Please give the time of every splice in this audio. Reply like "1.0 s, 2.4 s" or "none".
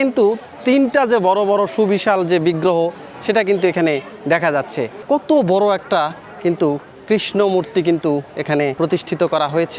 5.0 s, 8.7 s